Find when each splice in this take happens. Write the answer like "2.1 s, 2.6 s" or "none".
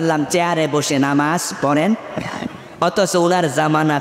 none